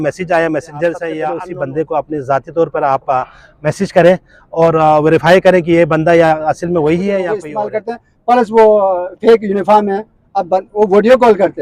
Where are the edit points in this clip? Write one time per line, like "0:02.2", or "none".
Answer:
0:01.2
0:07.5